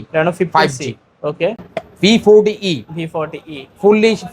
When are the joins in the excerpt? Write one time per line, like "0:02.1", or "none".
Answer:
0:01.7